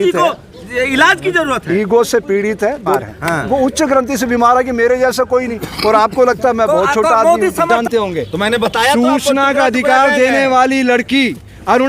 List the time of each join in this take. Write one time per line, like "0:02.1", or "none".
0:02.9
0:07.7